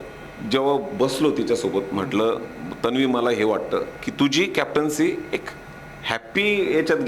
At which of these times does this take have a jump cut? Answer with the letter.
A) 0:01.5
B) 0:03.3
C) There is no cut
C